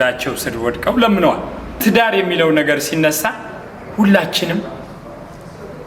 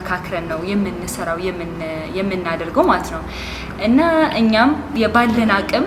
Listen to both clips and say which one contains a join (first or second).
first